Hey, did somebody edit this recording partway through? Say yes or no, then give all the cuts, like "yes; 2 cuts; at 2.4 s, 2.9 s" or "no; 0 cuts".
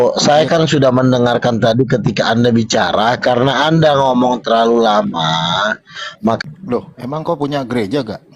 yes; 1 cut; at 6.4 s